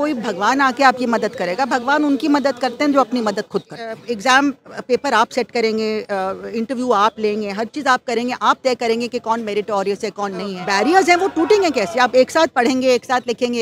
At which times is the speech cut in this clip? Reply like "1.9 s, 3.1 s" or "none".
4.0 s, 10.6 s